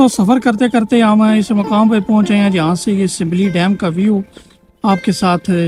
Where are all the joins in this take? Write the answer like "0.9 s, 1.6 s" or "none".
none